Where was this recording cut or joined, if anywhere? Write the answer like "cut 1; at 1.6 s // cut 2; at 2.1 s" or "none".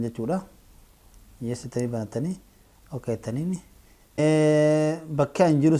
cut 1; at 4.2 s